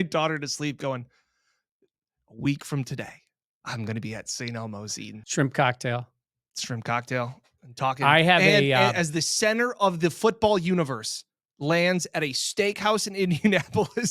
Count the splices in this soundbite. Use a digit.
1